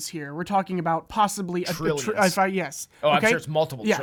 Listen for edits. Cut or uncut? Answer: uncut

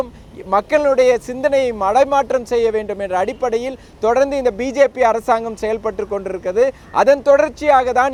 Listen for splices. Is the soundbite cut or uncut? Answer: uncut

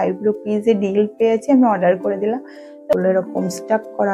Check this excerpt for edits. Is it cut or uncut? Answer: cut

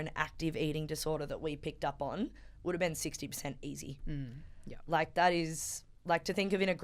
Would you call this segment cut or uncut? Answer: uncut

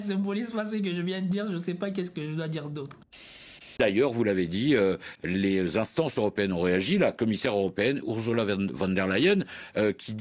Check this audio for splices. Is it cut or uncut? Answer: cut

